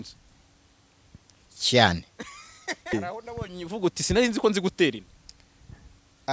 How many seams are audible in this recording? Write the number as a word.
one